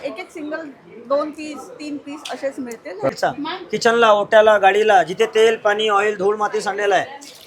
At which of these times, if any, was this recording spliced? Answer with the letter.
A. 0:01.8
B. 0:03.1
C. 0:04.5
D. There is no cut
B